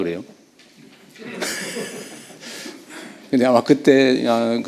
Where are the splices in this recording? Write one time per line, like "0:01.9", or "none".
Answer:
none